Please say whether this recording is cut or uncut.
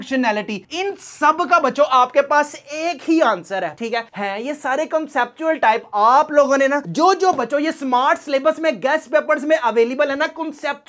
uncut